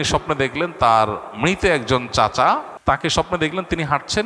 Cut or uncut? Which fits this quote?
cut